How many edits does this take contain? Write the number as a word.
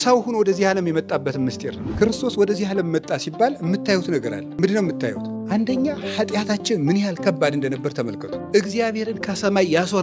four